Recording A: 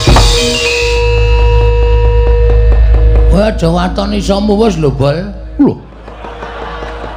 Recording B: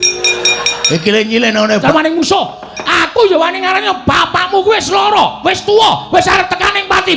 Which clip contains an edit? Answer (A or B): B